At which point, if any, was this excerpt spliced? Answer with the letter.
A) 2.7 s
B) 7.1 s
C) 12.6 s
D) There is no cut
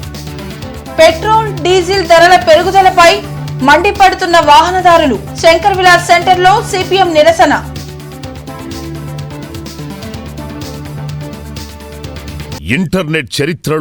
C